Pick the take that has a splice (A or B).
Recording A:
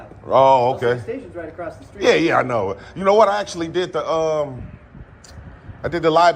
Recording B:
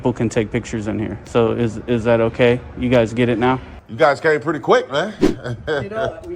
B